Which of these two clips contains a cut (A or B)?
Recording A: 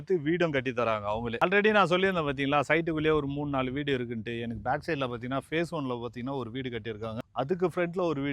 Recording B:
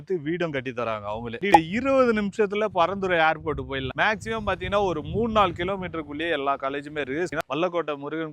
B